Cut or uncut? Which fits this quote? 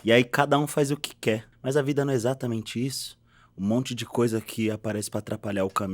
cut